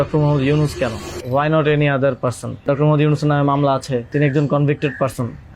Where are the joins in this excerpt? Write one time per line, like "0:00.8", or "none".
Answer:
0:01.1
0:02.6
0:04.1